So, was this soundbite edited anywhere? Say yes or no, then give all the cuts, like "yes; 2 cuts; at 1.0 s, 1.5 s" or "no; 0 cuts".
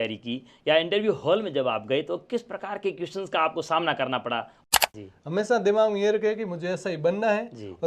yes; 1 cut; at 4.7 s